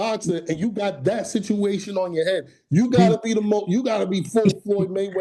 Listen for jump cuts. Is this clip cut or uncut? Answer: uncut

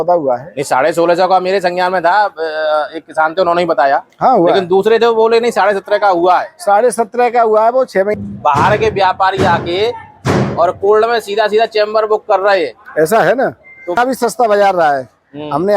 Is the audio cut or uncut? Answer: cut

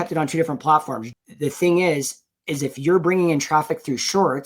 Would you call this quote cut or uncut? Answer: cut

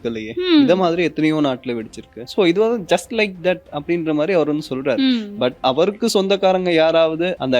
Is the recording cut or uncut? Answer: cut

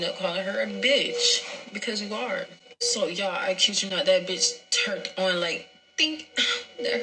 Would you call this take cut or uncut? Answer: uncut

